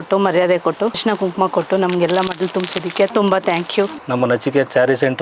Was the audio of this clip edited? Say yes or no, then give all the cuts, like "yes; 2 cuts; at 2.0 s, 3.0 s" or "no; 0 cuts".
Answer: yes; 3 cuts; at 1.0 s, 3.1 s, 4.0 s